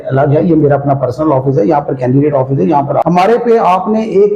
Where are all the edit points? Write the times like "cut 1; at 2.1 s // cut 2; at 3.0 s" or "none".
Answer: cut 1; at 3.0 s